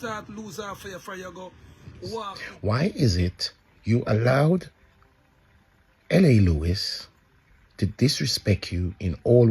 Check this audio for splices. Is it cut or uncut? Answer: cut